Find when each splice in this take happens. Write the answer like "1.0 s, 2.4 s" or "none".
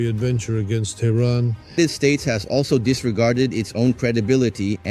1.8 s